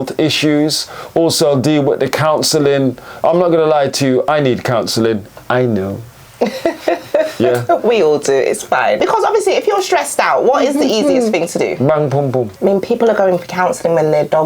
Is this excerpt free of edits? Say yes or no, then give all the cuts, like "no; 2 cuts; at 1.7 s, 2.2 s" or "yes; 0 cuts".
no; 3 cuts; at 4.2 s, 9.0 s, 12.5 s